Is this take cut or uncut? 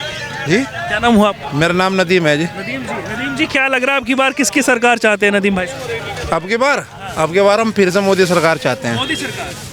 uncut